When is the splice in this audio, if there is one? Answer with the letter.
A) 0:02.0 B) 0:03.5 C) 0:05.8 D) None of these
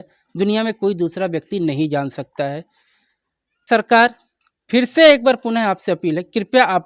B